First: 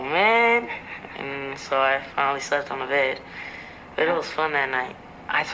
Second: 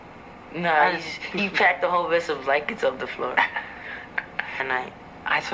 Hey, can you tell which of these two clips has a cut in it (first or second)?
second